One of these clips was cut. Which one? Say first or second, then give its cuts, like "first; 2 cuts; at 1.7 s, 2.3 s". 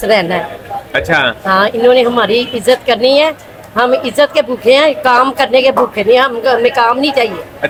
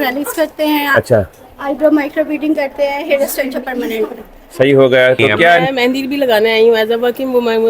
second; 1 cut; at 5.7 s